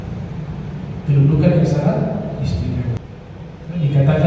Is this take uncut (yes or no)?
no